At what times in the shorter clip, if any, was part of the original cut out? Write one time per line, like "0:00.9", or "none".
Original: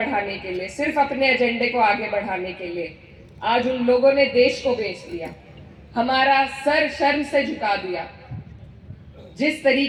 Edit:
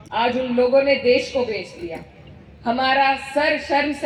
none